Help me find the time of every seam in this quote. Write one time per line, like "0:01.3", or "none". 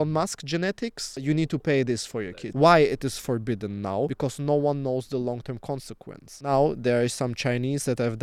0:01.2
0:02.4
0:04.1
0:06.5